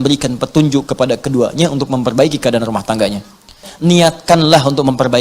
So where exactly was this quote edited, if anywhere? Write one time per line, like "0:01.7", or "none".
0:03.6